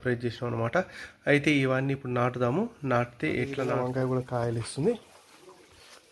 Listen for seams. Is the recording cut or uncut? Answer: cut